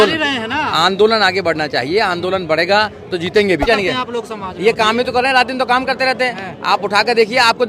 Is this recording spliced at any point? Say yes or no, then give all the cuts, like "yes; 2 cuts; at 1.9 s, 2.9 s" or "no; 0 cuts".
yes; 1 cut; at 3.7 s